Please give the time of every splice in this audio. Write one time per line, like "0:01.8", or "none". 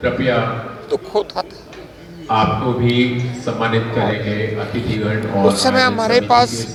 none